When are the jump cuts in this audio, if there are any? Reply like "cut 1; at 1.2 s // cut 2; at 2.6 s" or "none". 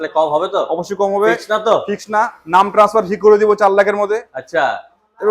none